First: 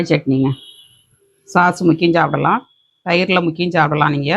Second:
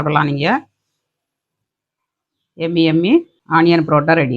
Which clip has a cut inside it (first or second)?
second